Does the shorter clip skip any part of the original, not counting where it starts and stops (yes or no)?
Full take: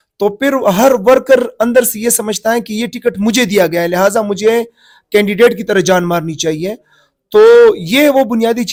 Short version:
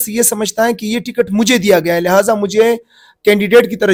no